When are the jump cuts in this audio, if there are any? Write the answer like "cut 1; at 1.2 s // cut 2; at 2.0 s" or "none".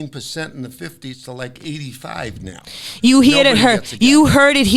none

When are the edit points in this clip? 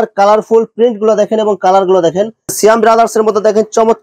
cut 1; at 2.4 s

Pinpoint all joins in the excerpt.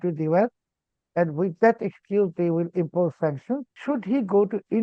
cut 1; at 3.7 s

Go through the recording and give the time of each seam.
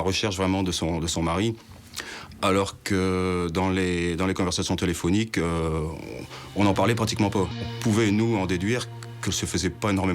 cut 1; at 7.6 s

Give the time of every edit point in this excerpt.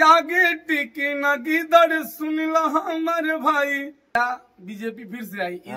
cut 1; at 4.2 s

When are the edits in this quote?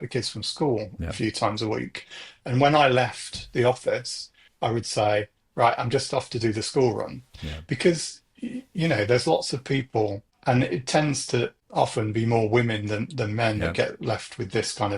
cut 1; at 10.3 s // cut 2; at 11.6 s

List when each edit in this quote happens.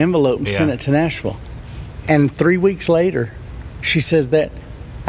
cut 1; at 2.0 s

